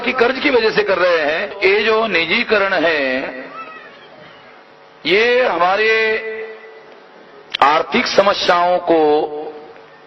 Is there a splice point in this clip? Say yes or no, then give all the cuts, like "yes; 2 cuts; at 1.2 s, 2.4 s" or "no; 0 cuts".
yes; 2 cuts; at 1.5 s, 4.7 s